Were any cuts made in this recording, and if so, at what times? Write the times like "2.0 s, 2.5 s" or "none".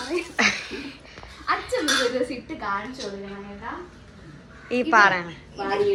none